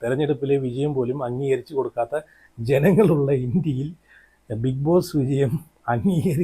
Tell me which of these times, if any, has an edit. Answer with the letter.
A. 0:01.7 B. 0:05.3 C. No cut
C